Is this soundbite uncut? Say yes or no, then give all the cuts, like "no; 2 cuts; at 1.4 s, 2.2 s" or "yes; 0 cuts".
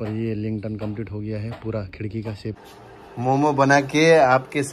no; 1 cut; at 2.6 s